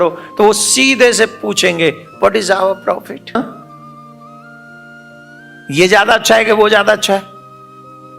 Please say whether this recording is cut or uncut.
cut